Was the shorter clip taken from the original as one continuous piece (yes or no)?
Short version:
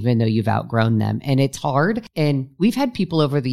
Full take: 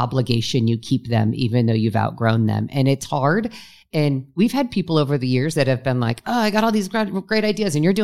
no